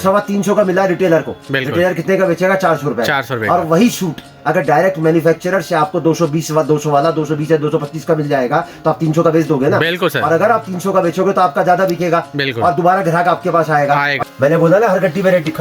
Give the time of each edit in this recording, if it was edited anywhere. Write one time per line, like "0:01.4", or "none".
0:14.2